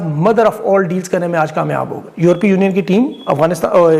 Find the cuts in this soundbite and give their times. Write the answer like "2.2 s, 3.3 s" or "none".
none